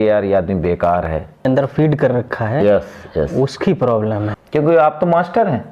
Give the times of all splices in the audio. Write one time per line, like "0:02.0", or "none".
0:01.5
0:04.3